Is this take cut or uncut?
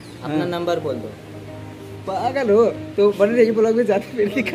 uncut